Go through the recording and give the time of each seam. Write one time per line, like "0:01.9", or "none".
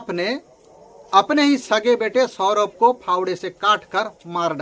none